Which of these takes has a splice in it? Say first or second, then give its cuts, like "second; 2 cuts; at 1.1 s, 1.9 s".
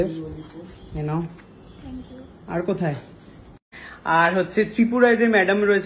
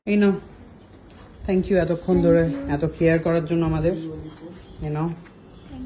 first; 1 cut; at 3.7 s